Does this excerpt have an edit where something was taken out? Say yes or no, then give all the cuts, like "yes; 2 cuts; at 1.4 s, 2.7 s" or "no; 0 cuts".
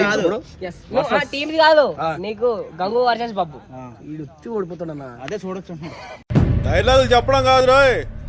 no; 0 cuts